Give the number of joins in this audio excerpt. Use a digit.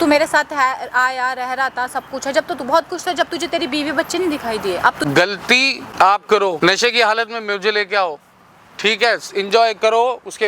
3